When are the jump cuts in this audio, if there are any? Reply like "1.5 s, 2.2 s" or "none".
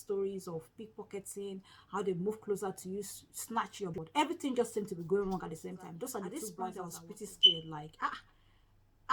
3.9 s, 6.9 s